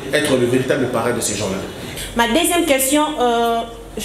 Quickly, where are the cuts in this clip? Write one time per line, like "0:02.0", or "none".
0:01.8